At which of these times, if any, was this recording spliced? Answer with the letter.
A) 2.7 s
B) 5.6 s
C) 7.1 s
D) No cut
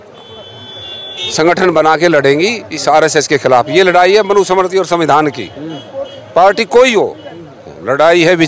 D